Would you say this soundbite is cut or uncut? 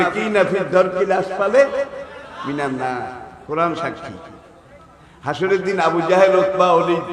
uncut